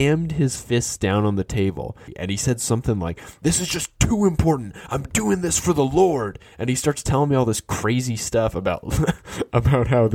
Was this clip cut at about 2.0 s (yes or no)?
yes